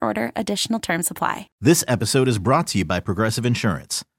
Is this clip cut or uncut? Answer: cut